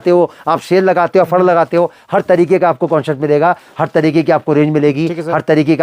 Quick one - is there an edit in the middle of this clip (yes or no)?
no